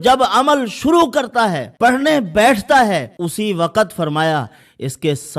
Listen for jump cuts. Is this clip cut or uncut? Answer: cut